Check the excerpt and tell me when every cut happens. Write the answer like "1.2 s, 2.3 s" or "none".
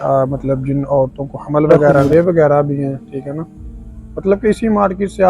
2.1 s